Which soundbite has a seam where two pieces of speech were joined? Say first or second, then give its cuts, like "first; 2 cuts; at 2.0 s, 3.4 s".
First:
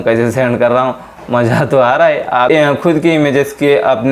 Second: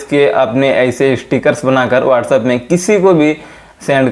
first; 1 cut; at 2.5 s